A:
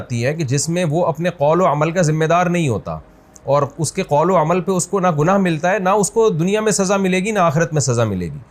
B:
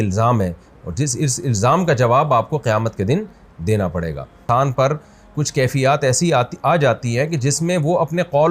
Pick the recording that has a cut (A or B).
B